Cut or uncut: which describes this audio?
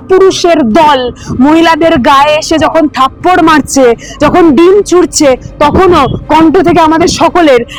uncut